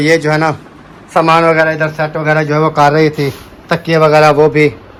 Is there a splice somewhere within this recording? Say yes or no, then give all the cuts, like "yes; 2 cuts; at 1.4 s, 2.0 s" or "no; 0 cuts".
no; 0 cuts